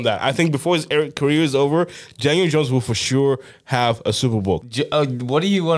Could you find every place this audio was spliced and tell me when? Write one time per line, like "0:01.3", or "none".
0:04.6